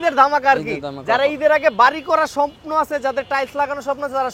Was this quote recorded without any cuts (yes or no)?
yes